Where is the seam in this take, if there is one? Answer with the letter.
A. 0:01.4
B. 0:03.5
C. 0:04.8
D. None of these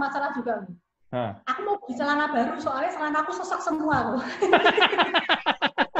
D